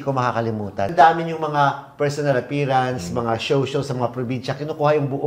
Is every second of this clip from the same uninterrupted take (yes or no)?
yes